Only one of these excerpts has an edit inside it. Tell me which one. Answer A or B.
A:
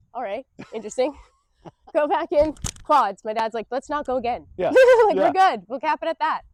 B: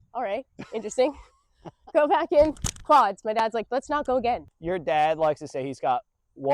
B